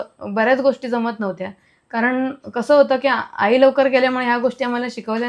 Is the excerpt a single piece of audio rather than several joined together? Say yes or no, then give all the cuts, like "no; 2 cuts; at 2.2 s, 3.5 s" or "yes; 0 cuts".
yes; 0 cuts